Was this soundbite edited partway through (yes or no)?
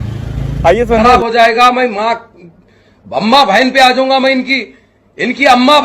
yes